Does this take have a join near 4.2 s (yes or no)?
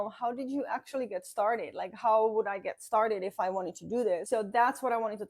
yes